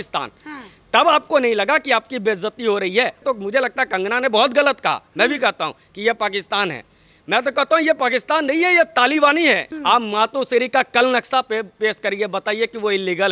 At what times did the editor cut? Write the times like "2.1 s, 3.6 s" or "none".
3.2 s, 9.7 s